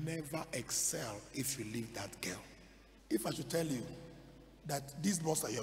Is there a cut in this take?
yes; 1 cut; at 2.9 s

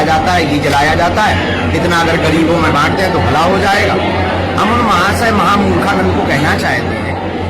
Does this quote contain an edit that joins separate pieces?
yes; 1 cut; at 5.2 s

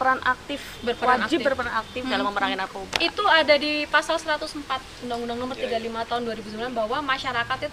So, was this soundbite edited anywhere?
no; 0 cuts

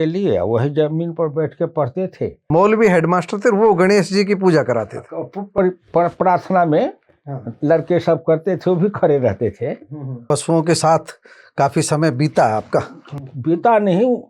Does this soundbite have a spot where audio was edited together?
yes; 2 cuts; at 2.5 s, 10.2 s

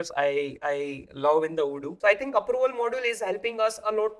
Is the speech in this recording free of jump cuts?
no; 1 cut; at 1.9 s

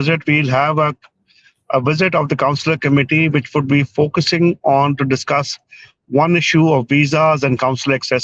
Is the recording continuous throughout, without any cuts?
yes; 0 cuts

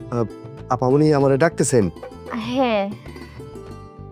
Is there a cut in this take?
yes; 1 cut; at 3.0 s

